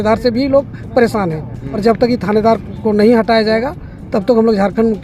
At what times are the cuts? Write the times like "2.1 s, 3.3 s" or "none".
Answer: 1.6 s

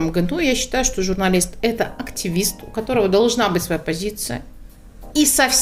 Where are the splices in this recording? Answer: none

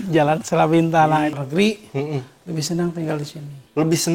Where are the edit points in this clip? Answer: 1.3 s

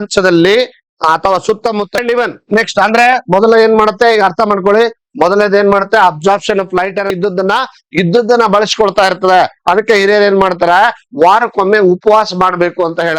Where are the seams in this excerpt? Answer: 2.0 s, 7.1 s

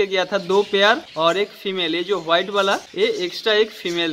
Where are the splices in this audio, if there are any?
1.1 s, 2.9 s

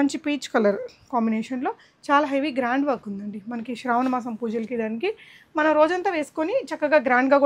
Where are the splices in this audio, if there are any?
none

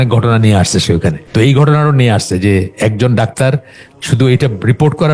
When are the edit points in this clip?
1.2 s

